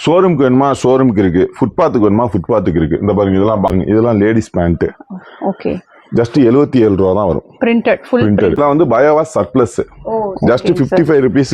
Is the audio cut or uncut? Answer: cut